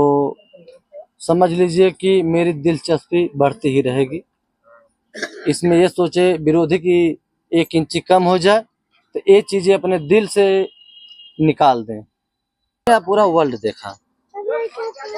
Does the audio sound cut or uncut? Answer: cut